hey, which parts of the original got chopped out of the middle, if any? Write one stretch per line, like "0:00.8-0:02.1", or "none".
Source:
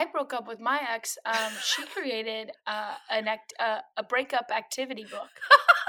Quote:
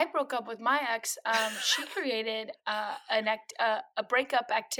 none